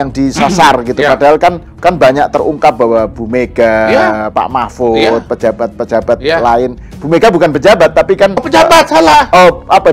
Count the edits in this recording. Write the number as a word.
two